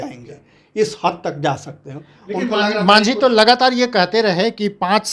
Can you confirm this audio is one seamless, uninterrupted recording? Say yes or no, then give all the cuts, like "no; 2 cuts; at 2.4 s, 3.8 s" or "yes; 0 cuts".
yes; 0 cuts